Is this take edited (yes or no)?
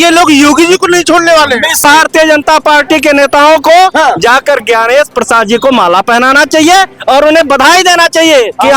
yes